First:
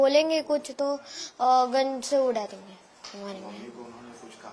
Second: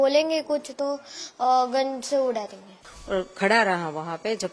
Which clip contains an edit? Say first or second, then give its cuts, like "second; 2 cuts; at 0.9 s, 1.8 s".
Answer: second; 1 cut; at 2.9 s